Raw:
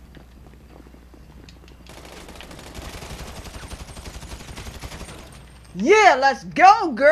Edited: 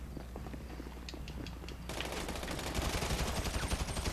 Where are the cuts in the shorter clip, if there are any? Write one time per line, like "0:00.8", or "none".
none